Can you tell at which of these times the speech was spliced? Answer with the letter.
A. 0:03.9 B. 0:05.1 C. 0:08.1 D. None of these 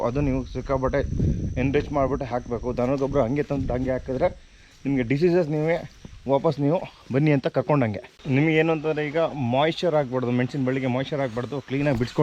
C